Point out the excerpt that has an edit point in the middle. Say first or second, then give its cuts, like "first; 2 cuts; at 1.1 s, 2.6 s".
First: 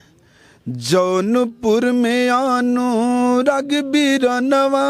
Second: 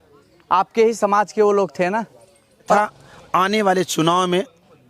second; 1 cut; at 2.8 s